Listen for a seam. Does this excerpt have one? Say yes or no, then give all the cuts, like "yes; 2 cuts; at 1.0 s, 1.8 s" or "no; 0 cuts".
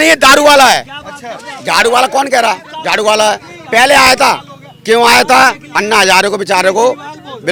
no; 0 cuts